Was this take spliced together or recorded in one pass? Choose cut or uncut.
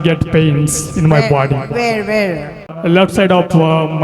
cut